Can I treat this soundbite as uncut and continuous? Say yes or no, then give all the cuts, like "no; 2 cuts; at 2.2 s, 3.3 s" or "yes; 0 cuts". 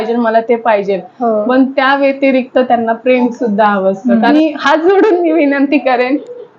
no; 1 cut; at 4.3 s